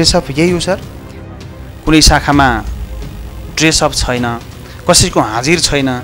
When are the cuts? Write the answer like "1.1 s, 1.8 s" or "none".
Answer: 1.3 s